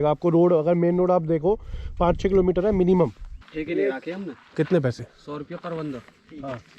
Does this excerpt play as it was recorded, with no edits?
no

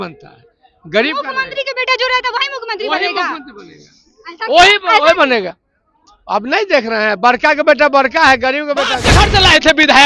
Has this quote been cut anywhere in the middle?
yes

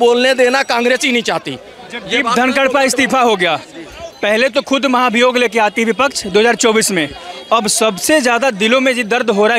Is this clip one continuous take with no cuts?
yes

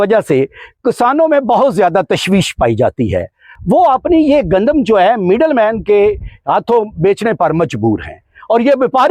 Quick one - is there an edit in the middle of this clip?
yes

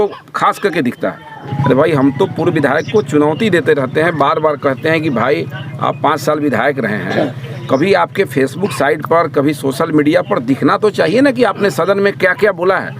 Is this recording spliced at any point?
yes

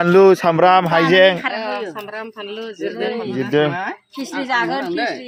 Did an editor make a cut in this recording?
no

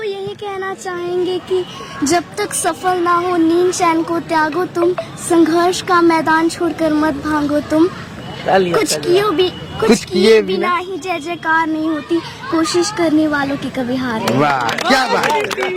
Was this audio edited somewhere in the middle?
no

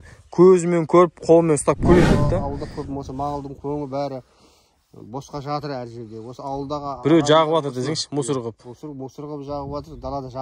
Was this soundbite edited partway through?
yes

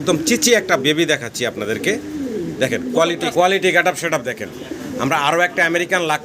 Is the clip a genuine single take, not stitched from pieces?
no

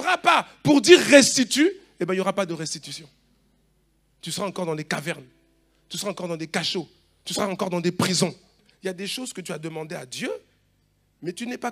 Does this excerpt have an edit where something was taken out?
yes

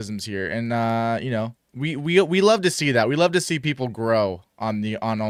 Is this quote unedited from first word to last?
yes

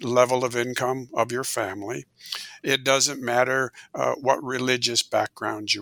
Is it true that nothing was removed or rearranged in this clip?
yes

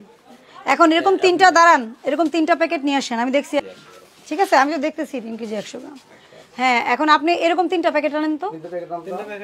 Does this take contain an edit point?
no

